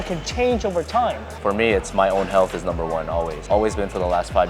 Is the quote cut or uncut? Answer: cut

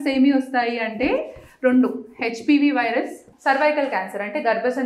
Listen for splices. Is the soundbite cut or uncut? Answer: cut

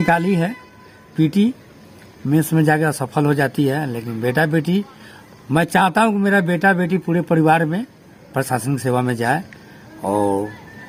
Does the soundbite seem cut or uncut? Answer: uncut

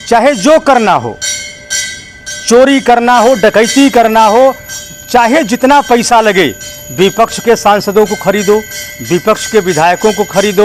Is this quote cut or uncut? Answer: uncut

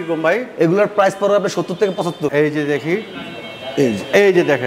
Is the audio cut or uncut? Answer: cut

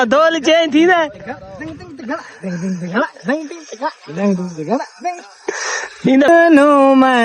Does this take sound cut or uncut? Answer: cut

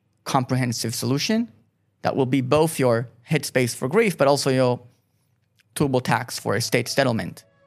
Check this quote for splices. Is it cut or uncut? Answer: uncut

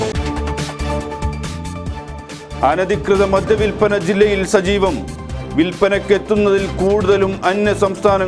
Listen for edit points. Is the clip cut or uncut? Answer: uncut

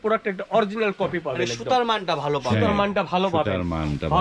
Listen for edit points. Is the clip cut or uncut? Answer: uncut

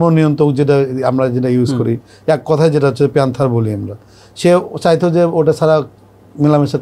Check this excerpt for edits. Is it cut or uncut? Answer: uncut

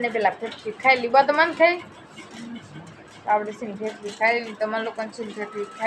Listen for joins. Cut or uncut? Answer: uncut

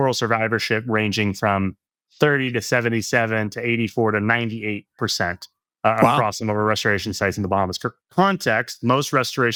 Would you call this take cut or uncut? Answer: uncut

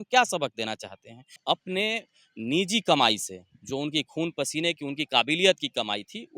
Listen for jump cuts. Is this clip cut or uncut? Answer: cut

